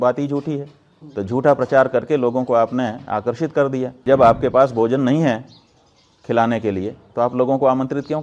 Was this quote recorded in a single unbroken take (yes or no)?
no